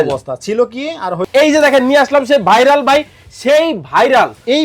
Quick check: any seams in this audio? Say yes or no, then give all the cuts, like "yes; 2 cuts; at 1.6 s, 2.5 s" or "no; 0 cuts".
yes; 1 cut; at 1.3 s